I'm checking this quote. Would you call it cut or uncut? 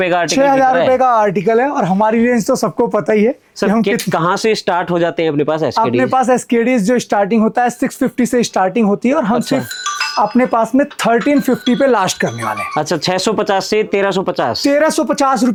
uncut